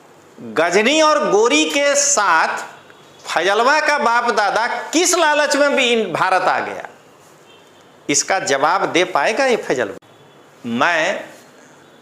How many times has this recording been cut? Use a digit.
1